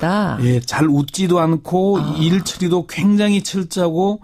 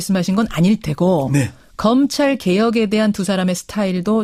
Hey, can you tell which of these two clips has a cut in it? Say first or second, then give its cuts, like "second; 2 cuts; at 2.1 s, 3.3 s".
first; 1 cut; at 2.3 s